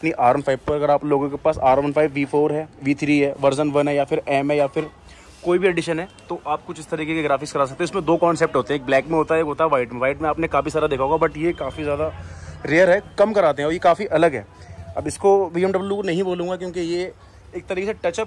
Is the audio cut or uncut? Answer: uncut